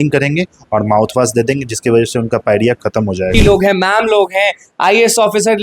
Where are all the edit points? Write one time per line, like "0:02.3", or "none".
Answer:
0:03.3